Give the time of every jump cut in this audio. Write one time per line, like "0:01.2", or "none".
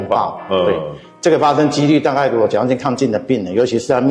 none